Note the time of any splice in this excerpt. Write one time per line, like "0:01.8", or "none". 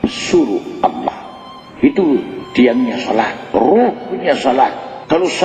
none